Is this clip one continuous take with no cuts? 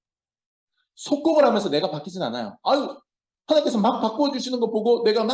yes; 0 cuts

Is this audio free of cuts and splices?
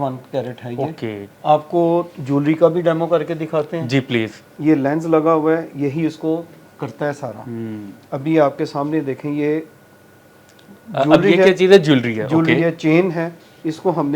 no; 2 cuts; at 1.2 s, 4.4 s

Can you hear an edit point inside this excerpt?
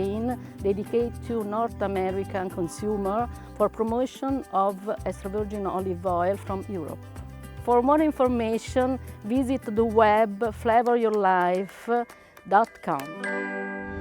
yes; 1 cut; at 13.1 s

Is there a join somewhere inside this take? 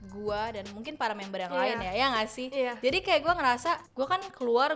yes; 1 cut; at 3.9 s

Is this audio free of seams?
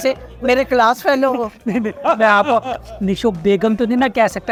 yes; 0 cuts

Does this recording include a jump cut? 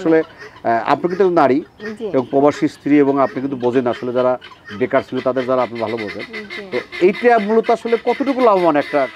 no; 0 cuts

